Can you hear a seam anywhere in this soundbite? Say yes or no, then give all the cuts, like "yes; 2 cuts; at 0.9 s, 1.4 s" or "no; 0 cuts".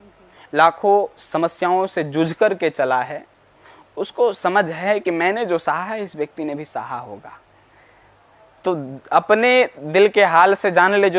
no; 0 cuts